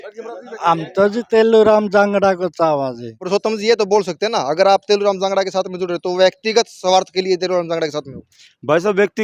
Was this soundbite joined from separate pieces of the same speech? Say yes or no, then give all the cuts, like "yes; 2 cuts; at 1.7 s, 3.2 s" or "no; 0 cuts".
yes; 1 cut; at 3.1 s